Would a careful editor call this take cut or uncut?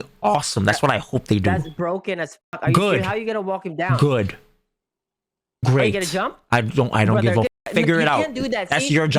uncut